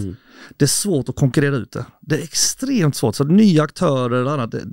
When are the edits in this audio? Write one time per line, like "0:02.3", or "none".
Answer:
none